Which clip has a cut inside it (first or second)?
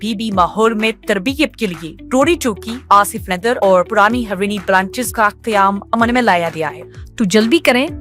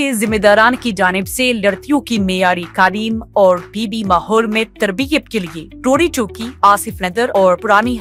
first